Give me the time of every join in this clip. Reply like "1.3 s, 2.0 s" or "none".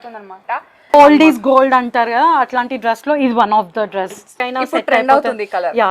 0.9 s, 4.4 s